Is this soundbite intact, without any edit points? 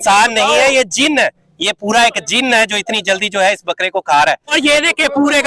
no; 1 cut; at 4.5 s

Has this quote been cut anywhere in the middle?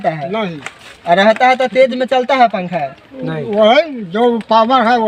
no; 0 cuts

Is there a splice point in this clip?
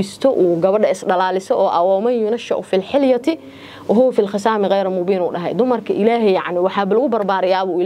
no; 0 cuts

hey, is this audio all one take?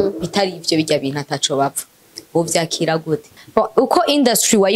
no; 1 cut; at 3.3 s

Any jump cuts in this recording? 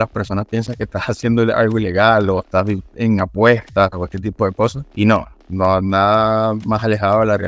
yes; 1 cut; at 4.8 s

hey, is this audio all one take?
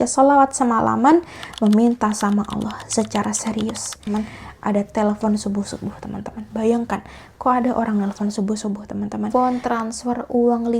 no; 2 cuts; at 4.0 s, 9.3 s

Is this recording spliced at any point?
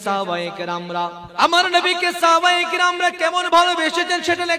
yes; 1 cut; at 1.2 s

